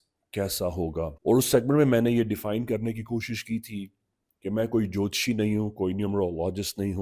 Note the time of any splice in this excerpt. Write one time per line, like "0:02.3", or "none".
0:01.2